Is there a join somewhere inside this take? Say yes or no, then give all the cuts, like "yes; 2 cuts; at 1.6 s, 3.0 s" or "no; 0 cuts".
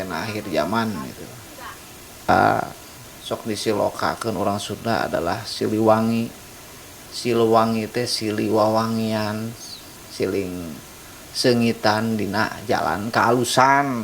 yes; 1 cut; at 2.3 s